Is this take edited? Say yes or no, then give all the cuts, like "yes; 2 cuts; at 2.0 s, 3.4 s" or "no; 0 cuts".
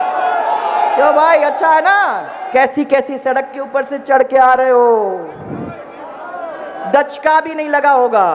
yes; 1 cut; at 2.3 s